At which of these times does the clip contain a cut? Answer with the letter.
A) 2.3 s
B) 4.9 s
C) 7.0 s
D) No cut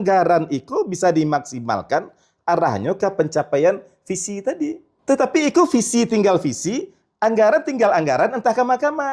B